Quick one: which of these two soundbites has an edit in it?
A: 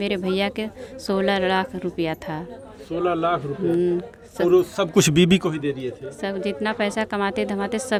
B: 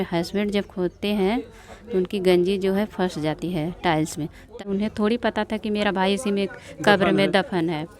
B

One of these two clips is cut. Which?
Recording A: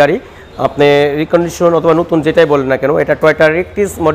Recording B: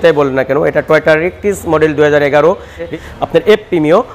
B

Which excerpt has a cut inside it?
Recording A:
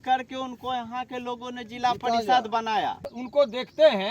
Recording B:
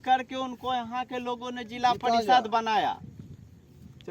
A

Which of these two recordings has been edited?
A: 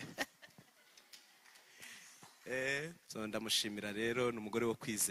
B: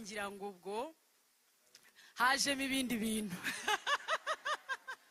A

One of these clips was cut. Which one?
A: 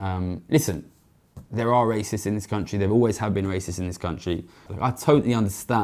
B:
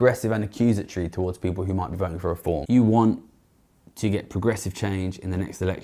B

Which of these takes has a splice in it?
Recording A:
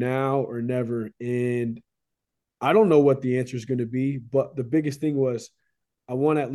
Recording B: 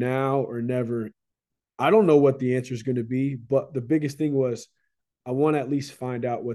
B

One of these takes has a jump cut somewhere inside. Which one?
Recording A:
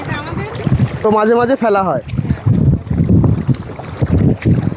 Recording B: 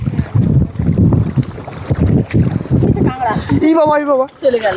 A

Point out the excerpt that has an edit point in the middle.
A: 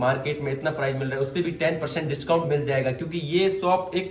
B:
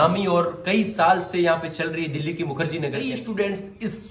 B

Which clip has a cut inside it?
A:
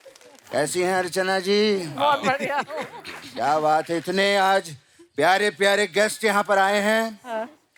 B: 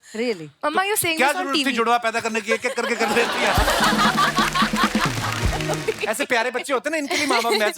B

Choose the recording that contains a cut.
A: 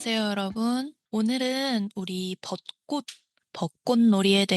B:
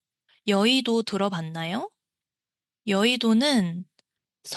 A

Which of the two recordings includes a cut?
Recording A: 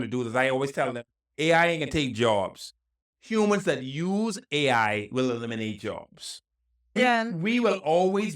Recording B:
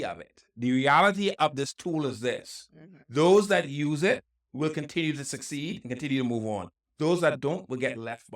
A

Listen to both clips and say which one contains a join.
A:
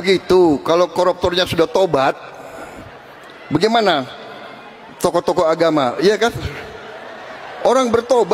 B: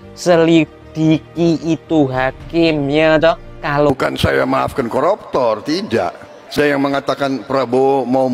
B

